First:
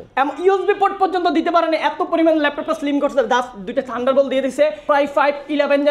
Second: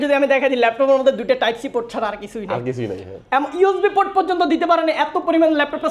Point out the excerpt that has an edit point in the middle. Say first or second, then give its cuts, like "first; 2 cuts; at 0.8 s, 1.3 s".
first; 1 cut; at 4.8 s